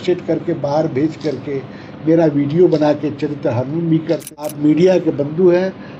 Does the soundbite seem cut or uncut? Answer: cut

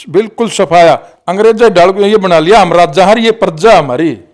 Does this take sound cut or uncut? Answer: cut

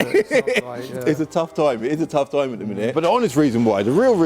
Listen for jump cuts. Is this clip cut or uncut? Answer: cut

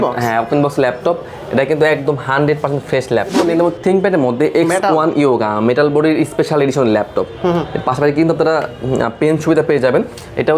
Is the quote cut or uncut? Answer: cut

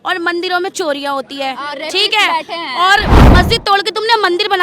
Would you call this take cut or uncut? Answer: cut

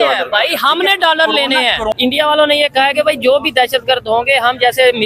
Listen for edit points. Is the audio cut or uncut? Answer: cut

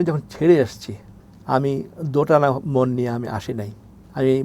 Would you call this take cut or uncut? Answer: uncut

